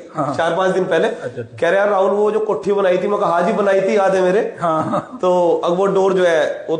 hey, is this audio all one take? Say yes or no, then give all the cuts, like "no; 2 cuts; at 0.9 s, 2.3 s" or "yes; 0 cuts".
yes; 0 cuts